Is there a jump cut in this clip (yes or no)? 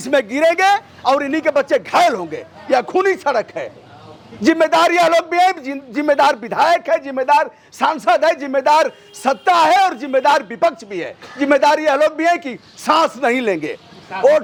no